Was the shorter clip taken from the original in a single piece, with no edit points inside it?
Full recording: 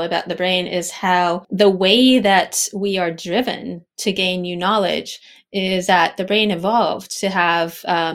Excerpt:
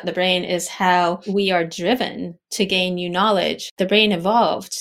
no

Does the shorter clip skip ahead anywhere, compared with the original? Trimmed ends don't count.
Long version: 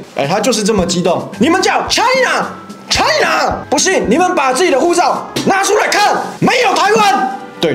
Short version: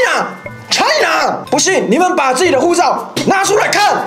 no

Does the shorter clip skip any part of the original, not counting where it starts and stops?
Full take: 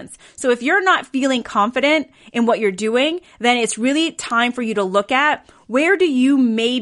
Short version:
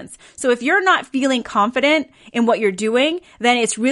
no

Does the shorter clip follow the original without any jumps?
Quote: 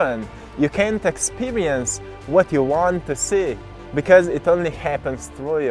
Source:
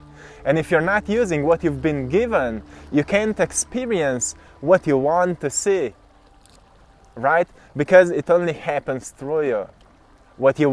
no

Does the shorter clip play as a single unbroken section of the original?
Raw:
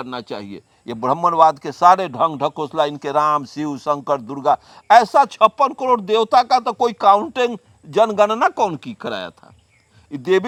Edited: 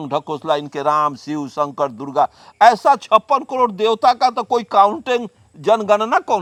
yes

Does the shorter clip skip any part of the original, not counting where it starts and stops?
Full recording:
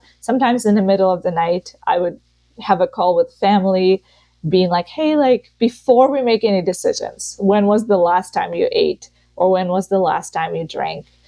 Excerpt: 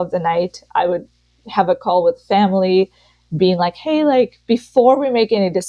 no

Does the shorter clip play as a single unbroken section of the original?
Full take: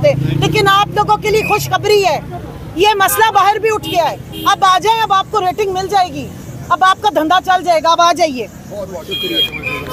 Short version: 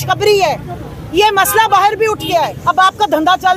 no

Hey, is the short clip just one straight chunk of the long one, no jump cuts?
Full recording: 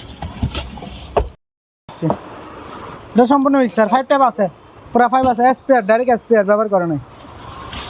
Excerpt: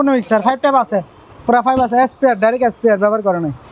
yes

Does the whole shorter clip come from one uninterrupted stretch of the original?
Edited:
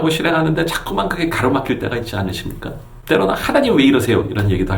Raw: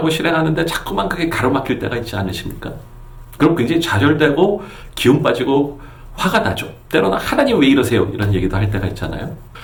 no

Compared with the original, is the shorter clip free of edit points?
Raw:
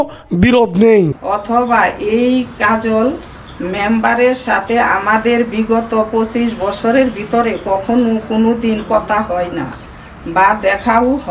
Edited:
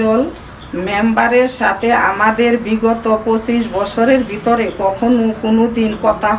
yes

